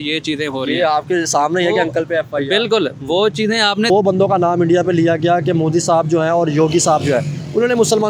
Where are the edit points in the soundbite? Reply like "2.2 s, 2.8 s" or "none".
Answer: 3.9 s